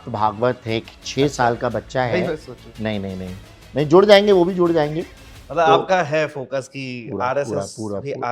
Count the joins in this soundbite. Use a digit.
0